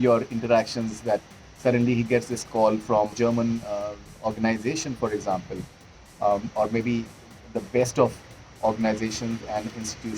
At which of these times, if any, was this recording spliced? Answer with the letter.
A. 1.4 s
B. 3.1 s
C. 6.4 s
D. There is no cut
B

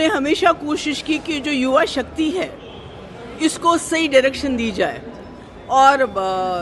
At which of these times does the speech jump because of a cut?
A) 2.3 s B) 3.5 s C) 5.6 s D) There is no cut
D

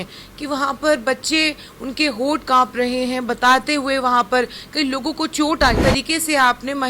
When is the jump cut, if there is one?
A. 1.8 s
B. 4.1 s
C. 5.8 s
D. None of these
C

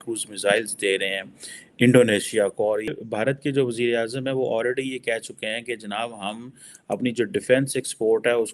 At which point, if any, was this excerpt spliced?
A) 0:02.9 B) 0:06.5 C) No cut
A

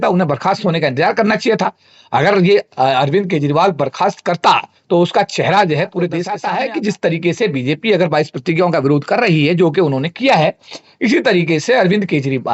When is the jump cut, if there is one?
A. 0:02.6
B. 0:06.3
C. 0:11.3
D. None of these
B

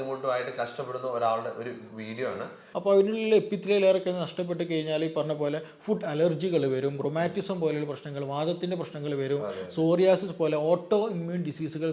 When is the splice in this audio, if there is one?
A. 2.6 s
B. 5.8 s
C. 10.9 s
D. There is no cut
A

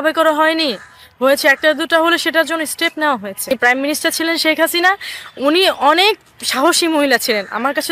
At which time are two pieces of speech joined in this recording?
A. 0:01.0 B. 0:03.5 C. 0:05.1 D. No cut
B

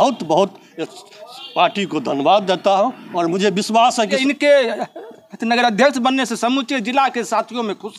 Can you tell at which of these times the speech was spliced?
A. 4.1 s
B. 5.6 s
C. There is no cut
A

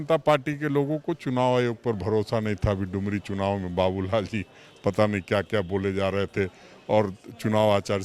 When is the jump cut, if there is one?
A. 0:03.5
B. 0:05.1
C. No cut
C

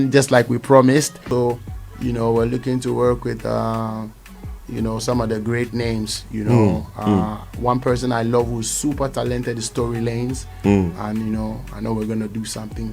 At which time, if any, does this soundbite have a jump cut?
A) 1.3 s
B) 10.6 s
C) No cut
A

